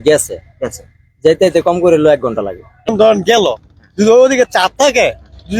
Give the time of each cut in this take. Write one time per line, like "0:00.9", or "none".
0:02.8